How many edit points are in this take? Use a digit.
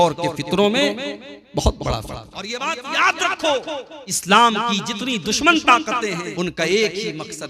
3